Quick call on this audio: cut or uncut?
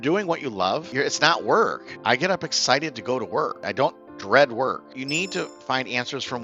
cut